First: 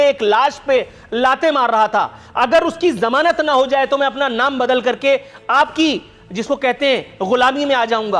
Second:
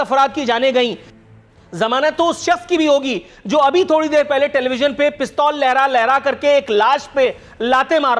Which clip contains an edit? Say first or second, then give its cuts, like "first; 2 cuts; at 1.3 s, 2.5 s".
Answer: second; 1 cut; at 1.1 s